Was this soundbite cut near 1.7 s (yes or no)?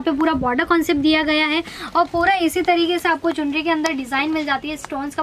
no